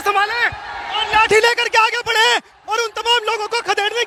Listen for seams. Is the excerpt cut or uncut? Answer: uncut